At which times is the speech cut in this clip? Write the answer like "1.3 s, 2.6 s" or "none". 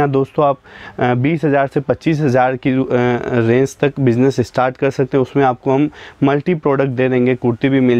none